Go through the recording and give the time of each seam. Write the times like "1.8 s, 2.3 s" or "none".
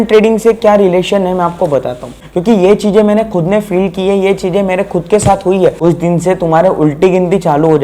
2.0 s, 5.8 s